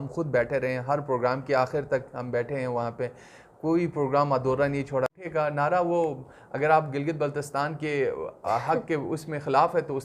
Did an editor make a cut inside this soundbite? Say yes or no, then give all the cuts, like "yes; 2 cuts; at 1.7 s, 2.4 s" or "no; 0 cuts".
yes; 1 cut; at 5.1 s